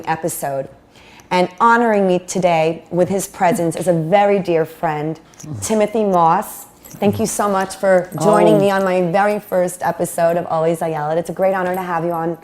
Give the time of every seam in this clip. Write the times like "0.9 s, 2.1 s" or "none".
7.2 s